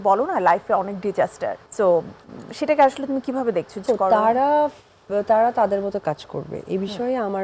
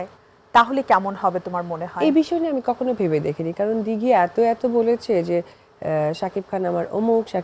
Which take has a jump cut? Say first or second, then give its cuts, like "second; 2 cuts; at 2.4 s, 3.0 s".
first; 2 cuts; at 1.6 s, 3.8 s